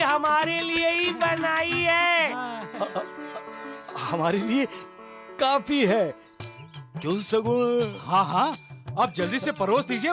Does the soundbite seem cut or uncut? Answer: uncut